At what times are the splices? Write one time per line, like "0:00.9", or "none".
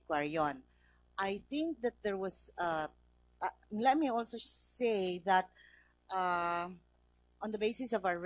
0:05.1